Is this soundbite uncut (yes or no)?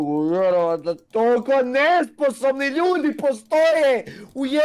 yes